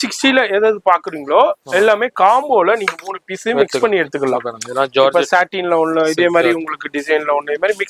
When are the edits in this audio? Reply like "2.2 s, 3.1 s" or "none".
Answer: none